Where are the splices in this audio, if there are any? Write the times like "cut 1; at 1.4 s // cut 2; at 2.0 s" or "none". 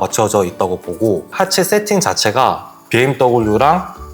cut 1; at 1.3 s